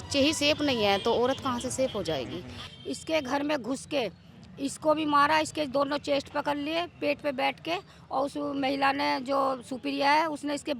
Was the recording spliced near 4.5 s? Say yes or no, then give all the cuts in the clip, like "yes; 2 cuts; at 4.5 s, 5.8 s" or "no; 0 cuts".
no; 1 cut; at 2.7 s